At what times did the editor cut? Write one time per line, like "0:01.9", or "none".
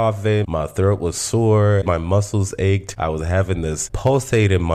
0:01.8
0:02.9